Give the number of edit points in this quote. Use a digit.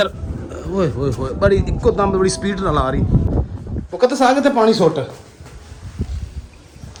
0